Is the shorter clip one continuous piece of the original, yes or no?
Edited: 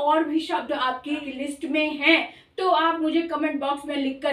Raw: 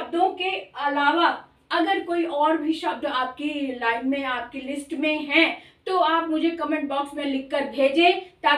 no